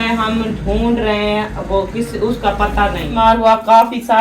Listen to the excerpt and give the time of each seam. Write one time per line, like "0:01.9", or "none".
0:03.1